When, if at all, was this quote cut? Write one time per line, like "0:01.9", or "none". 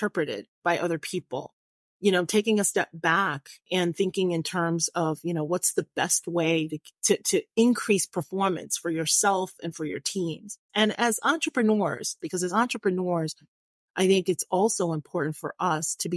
0:10.6
0:12.1